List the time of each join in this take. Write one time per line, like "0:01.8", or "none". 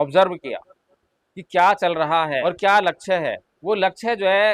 0:02.4
0:03.5